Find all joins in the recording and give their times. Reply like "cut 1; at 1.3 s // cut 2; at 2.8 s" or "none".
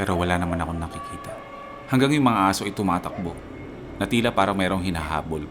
cut 1; at 1.6 s